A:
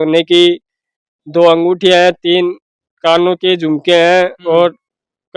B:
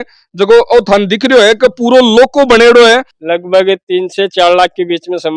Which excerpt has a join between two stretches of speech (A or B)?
B